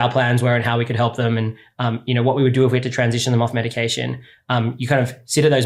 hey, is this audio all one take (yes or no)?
yes